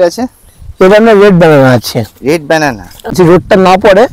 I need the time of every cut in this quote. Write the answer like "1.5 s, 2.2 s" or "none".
3.1 s

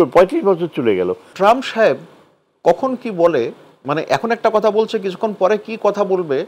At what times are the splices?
1.2 s

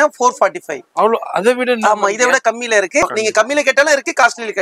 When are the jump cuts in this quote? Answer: 3.0 s

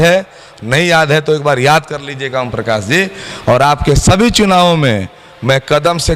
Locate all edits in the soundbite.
none

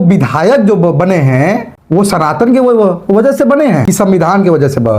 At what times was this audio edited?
1.7 s, 3.8 s

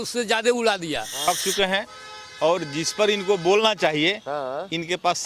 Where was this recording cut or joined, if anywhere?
1.1 s

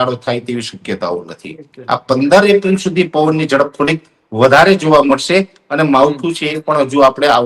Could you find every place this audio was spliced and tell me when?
none

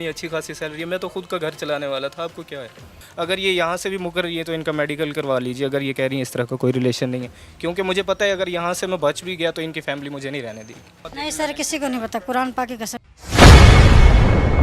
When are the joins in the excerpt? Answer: 2.9 s, 11.0 s

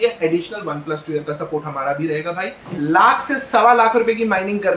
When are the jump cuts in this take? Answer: 2.6 s

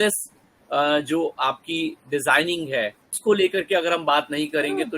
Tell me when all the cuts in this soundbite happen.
3.2 s

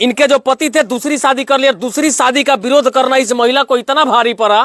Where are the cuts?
none

